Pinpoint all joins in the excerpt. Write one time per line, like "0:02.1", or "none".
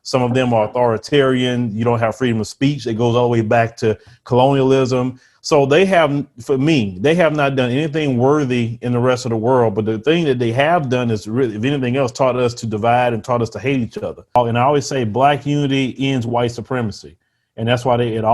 0:14.4